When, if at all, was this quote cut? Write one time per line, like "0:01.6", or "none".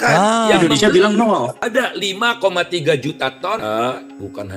0:01.6
0:03.6